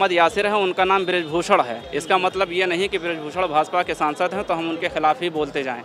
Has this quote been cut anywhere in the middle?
no; 0 cuts

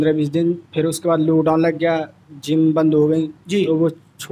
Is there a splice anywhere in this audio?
no; 0 cuts

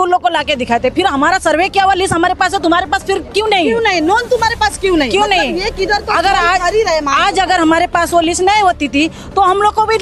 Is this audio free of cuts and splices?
yes; 0 cuts

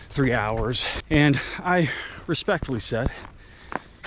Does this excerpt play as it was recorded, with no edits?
no; 1 cut; at 1.0 s

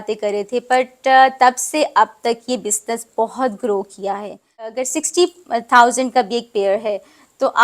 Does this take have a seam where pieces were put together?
yes; 1 cut; at 4.8 s

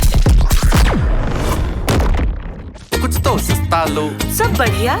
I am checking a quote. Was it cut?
yes; 2 cuts; at 2.8 s, 4.2 s

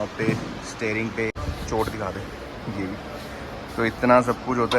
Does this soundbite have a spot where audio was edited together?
yes; 1 cut; at 1.5 s

